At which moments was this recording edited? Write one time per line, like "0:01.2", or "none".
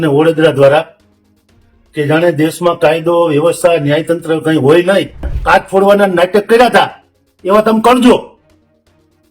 0:05.3